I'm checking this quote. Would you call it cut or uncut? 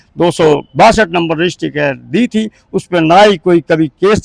uncut